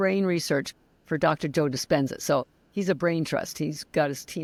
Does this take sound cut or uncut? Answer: uncut